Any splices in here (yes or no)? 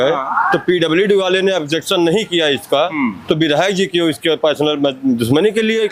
no